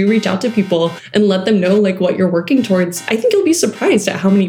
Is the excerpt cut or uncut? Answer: uncut